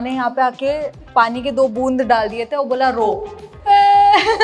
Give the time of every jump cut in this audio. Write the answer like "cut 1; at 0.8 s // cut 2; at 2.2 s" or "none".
cut 1; at 3.5 s